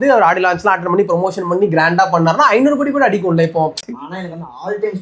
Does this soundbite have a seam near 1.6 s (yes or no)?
no